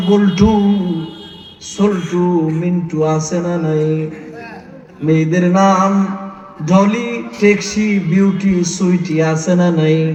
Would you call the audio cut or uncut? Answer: uncut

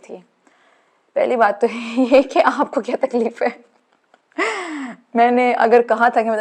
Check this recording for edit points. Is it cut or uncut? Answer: uncut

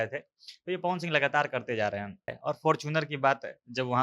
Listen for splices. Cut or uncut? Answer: cut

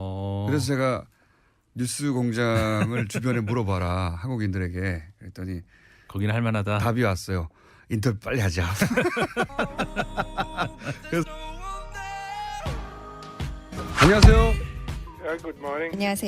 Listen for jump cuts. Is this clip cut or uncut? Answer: cut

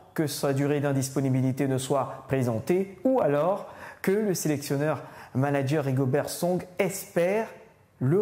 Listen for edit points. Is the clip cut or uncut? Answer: uncut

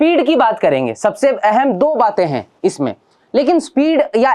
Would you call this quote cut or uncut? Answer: uncut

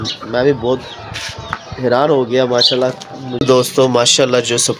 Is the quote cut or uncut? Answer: cut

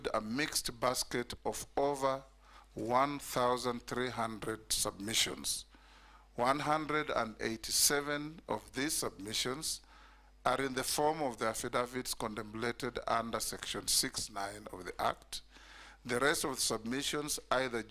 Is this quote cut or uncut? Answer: cut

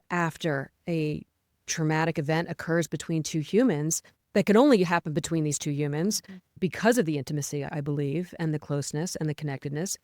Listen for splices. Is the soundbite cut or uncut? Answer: cut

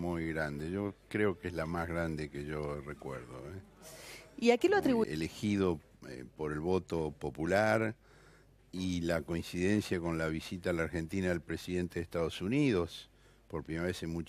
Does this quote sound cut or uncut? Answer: uncut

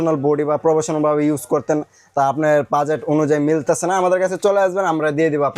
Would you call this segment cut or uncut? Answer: uncut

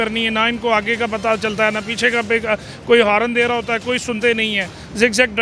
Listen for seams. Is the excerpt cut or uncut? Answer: uncut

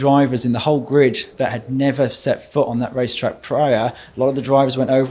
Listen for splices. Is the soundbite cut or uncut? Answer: uncut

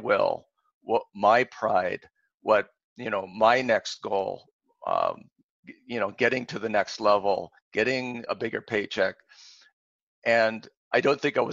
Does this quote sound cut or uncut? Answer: uncut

